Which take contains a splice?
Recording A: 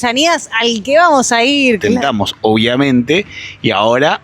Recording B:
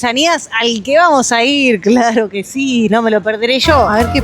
A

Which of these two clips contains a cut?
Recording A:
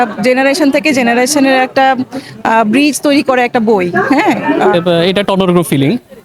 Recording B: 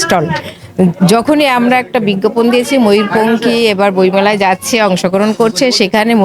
A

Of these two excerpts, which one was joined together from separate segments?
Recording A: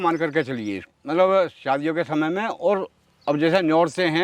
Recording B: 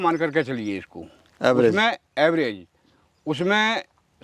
A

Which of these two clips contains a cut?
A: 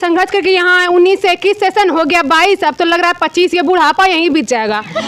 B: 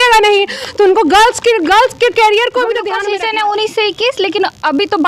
B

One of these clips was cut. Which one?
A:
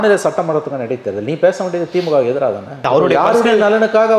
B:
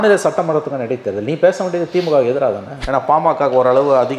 B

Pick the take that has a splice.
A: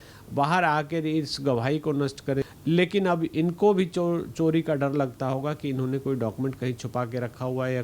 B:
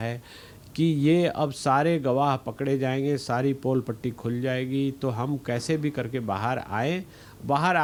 A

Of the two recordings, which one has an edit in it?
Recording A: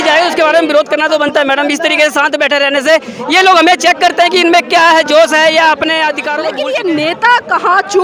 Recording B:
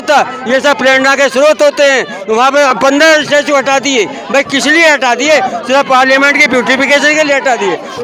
A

